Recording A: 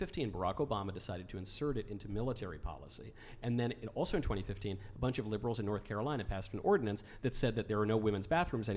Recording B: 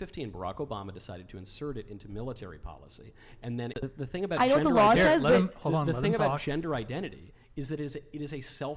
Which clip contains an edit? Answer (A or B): B